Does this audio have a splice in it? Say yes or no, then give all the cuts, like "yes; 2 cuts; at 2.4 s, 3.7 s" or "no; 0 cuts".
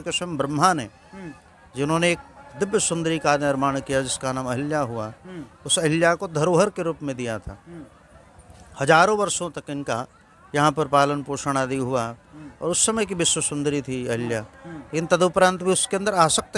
no; 0 cuts